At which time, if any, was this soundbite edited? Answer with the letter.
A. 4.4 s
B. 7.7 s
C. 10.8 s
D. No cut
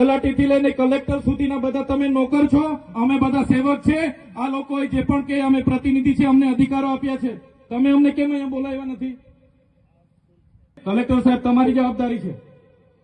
C